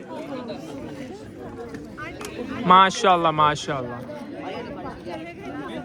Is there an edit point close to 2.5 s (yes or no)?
no